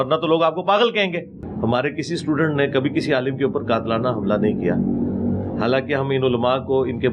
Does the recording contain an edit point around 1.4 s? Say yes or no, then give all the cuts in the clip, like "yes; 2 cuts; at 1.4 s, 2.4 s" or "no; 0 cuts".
yes; 1 cut; at 1.4 s